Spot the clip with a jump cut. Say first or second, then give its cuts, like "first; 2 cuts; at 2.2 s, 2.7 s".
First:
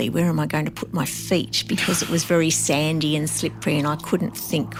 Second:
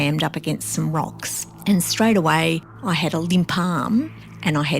second; 1 cut; at 2.7 s